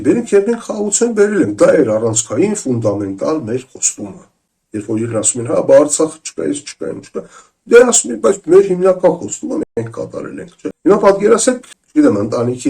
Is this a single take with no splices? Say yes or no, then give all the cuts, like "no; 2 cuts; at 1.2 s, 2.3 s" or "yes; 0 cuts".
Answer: no; 2 cuts; at 10.8 s, 11.7 s